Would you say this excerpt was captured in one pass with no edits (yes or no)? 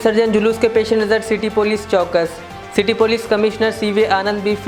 yes